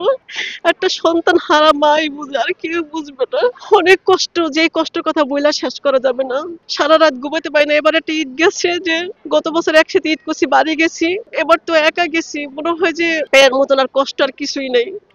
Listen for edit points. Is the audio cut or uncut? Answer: uncut